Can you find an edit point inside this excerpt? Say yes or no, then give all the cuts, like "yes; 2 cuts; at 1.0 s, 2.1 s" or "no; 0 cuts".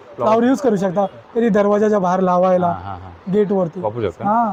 no; 0 cuts